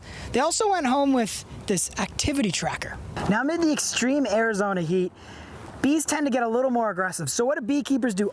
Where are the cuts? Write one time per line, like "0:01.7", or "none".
0:03.1